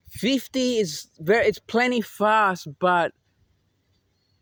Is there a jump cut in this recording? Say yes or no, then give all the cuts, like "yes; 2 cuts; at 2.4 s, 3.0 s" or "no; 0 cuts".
no; 0 cuts